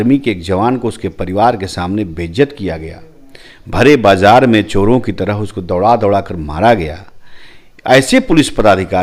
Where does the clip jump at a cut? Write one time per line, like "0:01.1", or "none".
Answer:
none